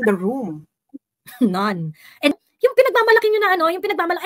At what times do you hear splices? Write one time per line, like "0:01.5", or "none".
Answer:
0:02.4